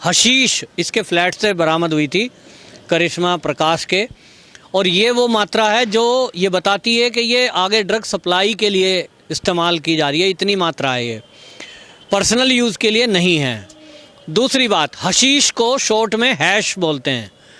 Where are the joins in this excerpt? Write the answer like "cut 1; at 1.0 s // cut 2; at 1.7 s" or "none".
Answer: none